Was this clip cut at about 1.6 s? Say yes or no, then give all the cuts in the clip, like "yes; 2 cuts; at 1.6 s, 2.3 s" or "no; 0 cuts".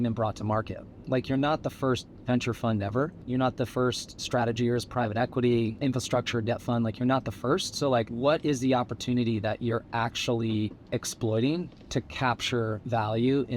no; 4 cuts; at 3.2 s, 4.1 s, 5.7 s, 8.1 s